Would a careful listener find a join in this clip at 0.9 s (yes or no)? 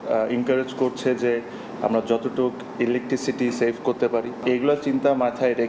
no